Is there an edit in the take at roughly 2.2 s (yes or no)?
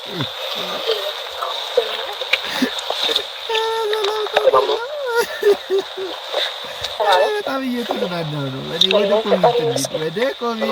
no